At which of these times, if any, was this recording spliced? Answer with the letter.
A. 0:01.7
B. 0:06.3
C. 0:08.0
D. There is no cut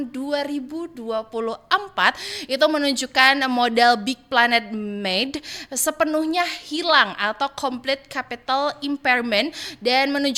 D